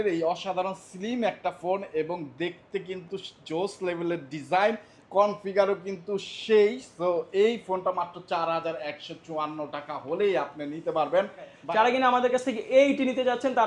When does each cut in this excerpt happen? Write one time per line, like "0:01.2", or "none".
0:11.5